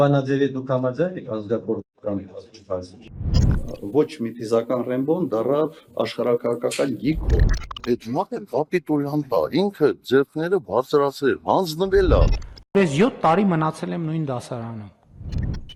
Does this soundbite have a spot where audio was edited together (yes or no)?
no